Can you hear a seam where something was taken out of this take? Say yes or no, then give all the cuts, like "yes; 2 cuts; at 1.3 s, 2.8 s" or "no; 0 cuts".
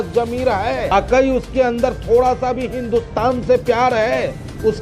yes; 1 cut; at 0.9 s